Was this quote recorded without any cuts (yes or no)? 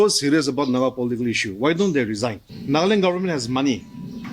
no